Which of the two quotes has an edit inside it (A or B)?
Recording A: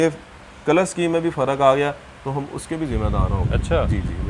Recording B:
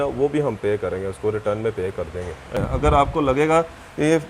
B